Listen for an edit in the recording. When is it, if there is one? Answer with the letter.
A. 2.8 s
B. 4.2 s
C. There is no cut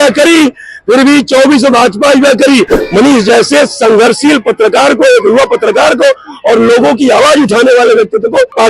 A